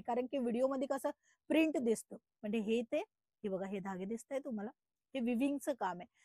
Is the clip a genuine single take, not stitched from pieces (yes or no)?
yes